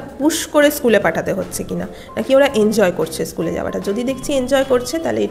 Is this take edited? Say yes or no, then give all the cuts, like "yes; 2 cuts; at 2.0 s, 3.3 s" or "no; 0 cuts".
no; 0 cuts